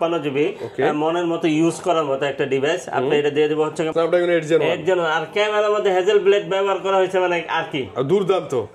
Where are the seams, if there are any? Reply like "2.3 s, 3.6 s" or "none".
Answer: 3.9 s